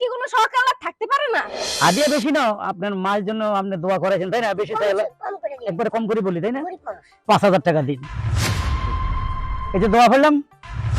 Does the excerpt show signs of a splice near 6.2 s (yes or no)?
no